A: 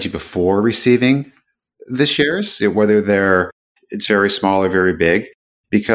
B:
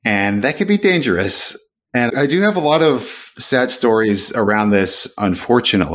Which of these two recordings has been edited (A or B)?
B